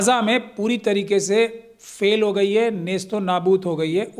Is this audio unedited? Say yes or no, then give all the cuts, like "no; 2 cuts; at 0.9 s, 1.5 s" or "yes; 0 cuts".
yes; 0 cuts